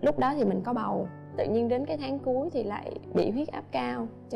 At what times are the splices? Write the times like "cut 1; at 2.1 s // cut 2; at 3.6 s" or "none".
cut 1; at 1.2 s